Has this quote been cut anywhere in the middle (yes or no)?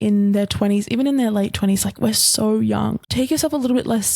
yes